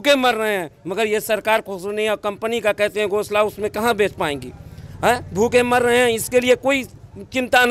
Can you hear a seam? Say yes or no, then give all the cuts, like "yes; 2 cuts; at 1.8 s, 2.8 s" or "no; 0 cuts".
no; 0 cuts